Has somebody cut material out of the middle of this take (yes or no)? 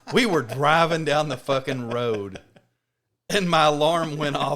yes